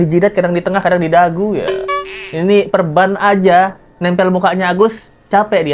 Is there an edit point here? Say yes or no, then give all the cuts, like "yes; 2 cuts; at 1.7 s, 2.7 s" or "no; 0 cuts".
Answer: no; 0 cuts